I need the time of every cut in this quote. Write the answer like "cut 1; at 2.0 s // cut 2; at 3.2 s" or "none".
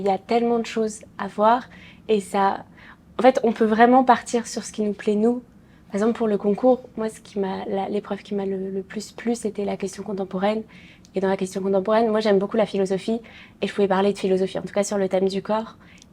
none